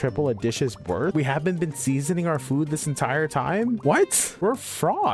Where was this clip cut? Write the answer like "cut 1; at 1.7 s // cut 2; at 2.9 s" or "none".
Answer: cut 1; at 1.1 s // cut 2; at 3.9 s